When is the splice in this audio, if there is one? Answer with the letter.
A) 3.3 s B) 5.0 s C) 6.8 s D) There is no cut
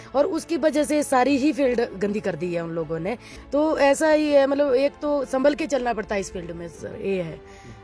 A